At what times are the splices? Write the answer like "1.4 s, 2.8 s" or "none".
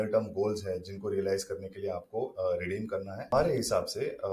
3.3 s